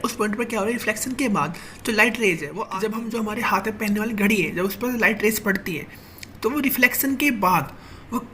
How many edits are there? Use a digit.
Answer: 1